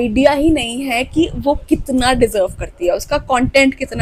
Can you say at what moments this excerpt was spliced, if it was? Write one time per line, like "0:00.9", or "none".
none